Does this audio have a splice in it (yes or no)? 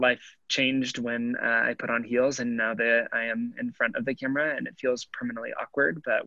no